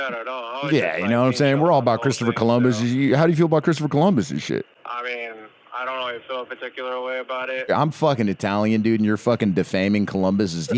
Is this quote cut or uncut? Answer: cut